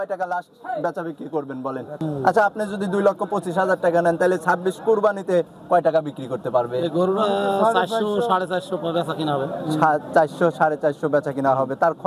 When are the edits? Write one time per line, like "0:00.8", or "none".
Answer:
0:01.9